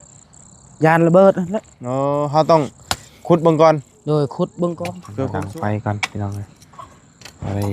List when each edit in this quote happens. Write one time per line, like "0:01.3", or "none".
0:05.0